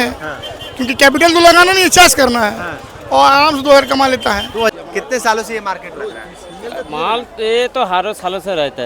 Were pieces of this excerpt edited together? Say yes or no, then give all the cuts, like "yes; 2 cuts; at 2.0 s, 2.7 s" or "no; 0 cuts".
yes; 1 cut; at 4.7 s